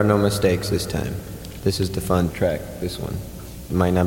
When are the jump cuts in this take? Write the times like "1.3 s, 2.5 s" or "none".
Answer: 2.3 s